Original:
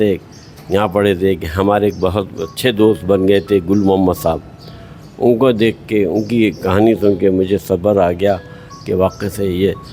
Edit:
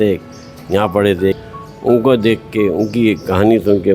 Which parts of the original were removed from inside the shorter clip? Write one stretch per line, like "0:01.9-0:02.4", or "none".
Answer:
0:01.4-0:04.8